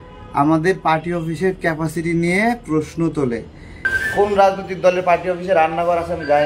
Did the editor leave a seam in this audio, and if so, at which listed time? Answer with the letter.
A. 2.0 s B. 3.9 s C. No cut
B